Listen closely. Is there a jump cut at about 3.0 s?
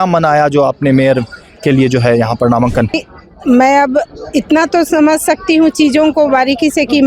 yes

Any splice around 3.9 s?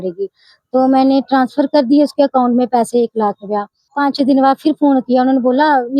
yes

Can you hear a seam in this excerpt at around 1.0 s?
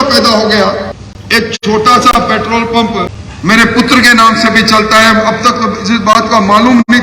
yes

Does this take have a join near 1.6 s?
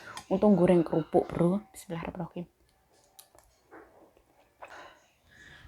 no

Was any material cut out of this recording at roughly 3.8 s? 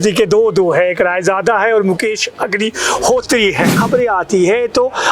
yes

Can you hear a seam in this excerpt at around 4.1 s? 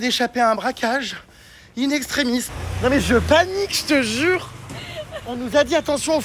no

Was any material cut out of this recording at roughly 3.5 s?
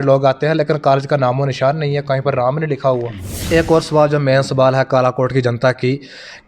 yes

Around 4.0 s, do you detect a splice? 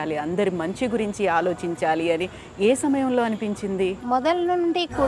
yes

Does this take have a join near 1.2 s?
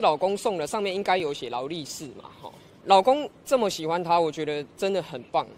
no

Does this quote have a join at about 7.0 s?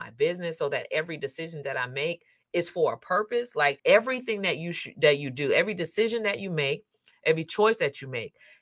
no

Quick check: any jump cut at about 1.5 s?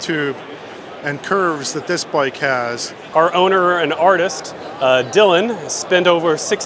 no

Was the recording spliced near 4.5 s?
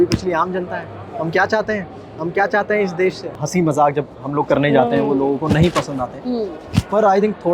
no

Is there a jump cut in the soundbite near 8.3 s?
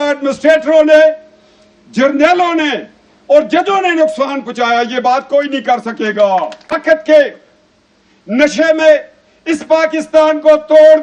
no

